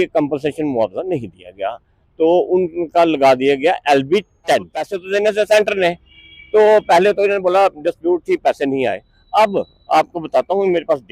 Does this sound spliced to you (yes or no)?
yes